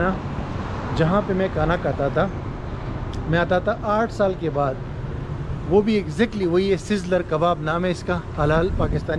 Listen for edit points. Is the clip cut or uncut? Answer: uncut